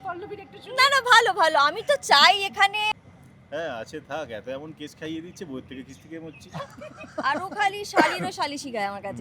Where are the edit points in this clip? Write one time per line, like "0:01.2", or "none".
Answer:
0:02.9